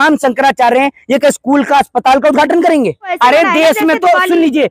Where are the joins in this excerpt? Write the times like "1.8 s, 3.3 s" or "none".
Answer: 3.1 s